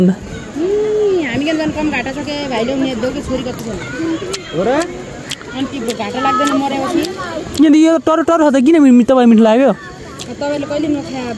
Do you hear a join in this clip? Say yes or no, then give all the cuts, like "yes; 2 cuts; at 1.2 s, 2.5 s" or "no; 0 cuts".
no; 0 cuts